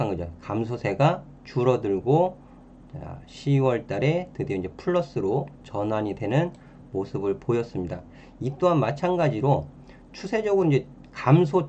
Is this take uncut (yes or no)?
yes